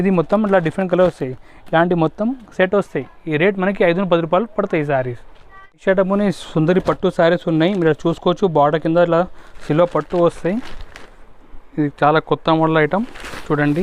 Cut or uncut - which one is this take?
uncut